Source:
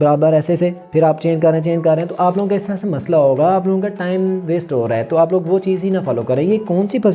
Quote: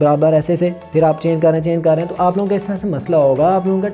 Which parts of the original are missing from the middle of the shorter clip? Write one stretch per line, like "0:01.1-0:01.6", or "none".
none

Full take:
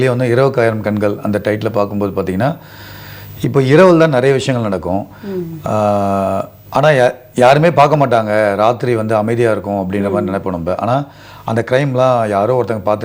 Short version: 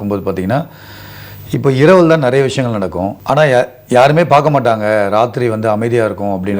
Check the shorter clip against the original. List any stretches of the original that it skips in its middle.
0:05.0-0:06.6

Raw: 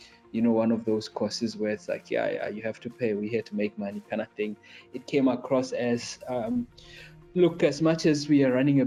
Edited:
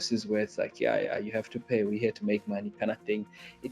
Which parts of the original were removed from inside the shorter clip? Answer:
none

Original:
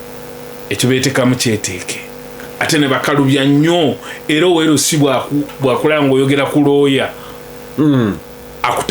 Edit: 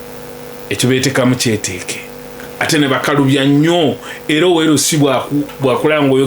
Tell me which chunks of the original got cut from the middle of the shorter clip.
none

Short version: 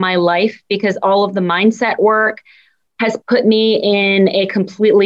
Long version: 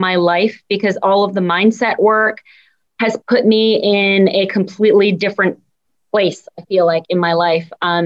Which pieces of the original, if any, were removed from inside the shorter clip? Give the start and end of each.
none

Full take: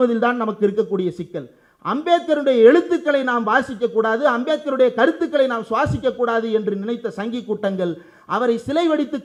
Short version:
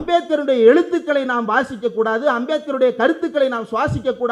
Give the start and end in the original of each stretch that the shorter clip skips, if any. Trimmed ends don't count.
none

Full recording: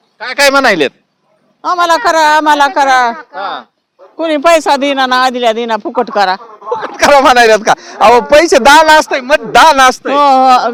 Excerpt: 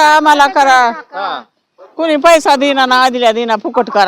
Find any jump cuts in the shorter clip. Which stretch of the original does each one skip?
none

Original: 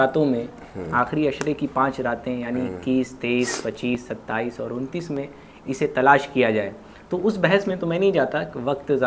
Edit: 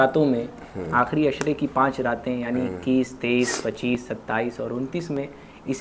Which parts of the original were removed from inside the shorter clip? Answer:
none

